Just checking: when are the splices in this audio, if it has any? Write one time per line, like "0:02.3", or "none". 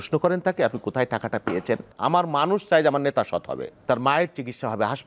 0:01.9
0:03.8